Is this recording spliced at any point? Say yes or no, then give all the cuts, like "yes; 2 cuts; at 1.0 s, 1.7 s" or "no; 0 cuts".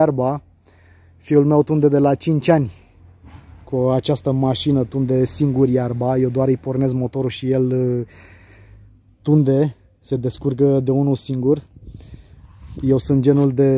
no; 0 cuts